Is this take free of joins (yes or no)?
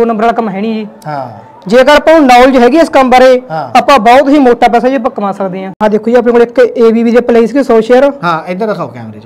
no